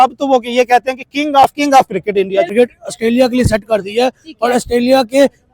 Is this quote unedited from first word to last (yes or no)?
no